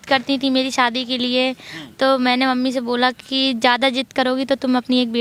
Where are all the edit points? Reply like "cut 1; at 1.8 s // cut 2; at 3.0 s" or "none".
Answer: none